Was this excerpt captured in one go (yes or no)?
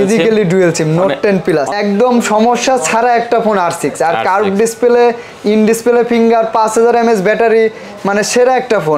no